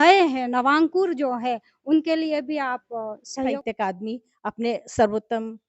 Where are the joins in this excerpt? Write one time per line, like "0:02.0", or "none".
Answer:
0:03.6